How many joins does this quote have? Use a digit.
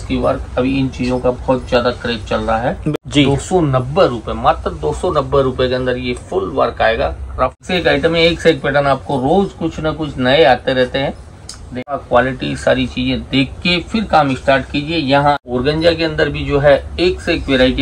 4